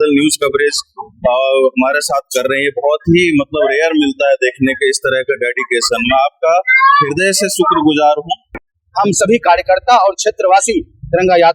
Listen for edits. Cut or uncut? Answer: cut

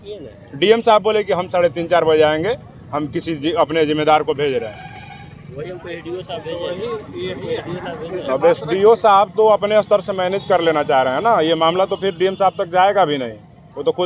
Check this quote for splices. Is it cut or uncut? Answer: uncut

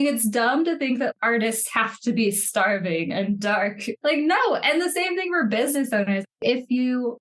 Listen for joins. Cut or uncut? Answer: cut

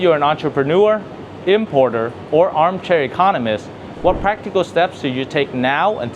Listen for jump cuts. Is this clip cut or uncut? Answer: uncut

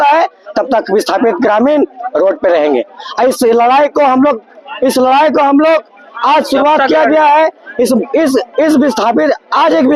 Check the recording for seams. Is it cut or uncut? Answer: uncut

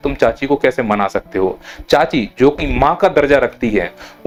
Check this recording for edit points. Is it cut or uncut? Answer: uncut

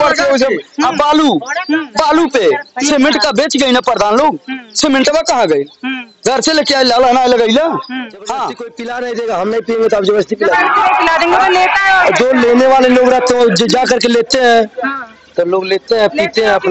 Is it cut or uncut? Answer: cut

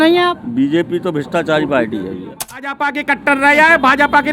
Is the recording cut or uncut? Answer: cut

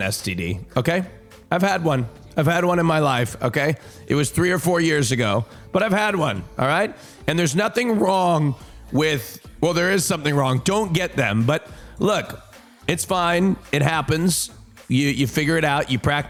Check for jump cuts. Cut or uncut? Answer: uncut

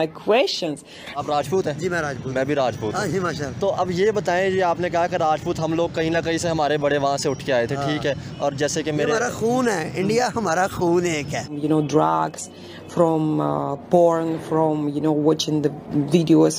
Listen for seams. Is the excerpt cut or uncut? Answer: cut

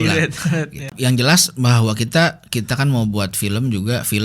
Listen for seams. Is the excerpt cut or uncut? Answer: cut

